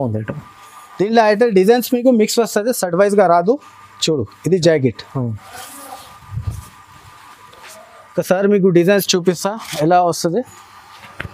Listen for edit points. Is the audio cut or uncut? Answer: uncut